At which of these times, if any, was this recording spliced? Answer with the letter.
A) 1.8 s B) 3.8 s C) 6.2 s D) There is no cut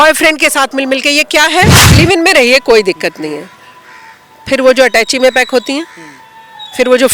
A